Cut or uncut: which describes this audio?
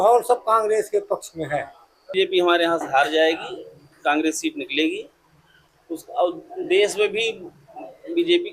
cut